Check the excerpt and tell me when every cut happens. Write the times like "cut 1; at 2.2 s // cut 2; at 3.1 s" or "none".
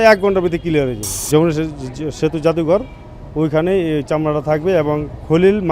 cut 1; at 1.1 s